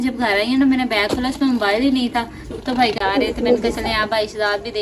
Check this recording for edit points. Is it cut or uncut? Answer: cut